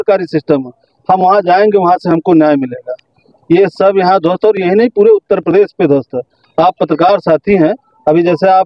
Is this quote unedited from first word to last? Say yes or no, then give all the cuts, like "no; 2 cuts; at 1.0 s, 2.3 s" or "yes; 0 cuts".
yes; 0 cuts